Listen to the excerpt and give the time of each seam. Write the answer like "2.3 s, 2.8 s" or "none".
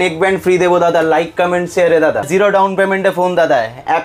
2.3 s

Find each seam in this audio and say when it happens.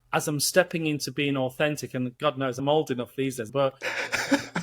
3.5 s

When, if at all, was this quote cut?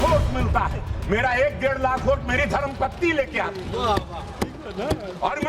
none

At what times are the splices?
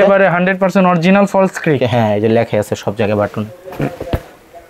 none

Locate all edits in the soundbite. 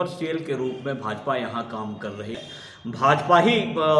2.4 s

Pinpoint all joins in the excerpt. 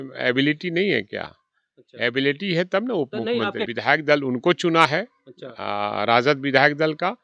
3.6 s

